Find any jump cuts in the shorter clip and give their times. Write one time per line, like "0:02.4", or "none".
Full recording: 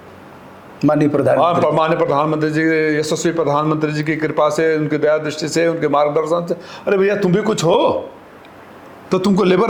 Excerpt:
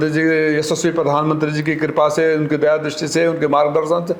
none